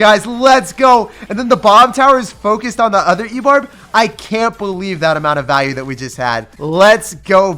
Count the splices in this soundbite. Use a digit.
1